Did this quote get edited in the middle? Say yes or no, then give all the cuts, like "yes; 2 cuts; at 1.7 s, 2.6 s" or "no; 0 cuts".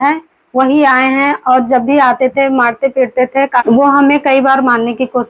yes; 1 cut; at 3.6 s